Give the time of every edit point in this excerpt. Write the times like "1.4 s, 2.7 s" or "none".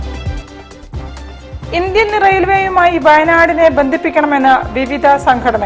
1.1 s